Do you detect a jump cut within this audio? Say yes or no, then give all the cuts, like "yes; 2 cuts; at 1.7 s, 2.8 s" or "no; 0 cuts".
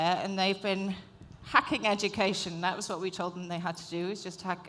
no; 0 cuts